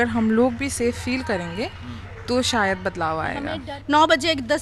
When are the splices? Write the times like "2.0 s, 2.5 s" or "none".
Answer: 3.7 s